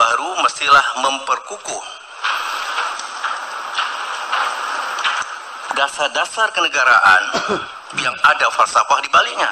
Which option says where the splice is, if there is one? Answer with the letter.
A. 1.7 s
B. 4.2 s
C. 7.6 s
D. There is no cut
D